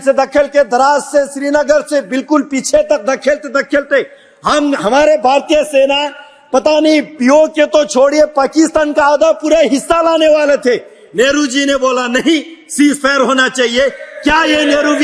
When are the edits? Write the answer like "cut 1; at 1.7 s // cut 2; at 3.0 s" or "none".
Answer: none